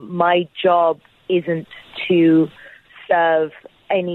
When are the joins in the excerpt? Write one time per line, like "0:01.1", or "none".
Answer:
none